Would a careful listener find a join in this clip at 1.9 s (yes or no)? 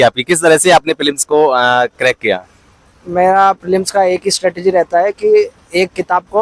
no